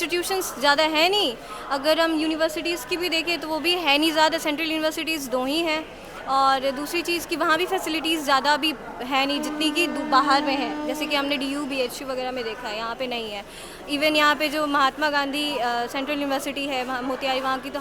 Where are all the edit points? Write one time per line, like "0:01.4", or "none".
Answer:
none